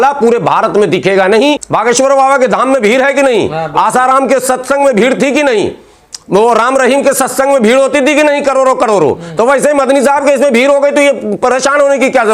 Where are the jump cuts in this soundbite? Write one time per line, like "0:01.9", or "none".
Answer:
0:01.7